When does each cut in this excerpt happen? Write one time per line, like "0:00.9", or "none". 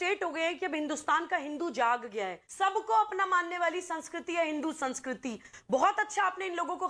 0:02.4